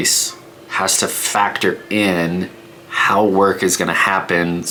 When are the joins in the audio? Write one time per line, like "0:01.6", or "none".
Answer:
none